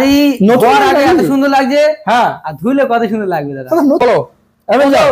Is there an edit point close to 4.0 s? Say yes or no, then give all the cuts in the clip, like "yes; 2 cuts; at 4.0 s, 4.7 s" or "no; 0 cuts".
yes; 1 cut; at 4.0 s